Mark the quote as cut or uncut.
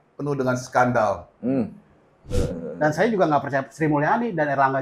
cut